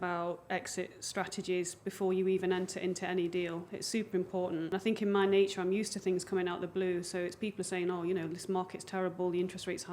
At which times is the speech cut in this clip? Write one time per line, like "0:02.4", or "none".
0:04.7